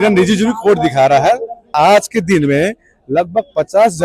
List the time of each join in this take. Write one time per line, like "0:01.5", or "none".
0:01.7